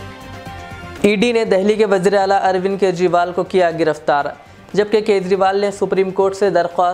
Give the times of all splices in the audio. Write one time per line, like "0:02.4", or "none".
0:00.9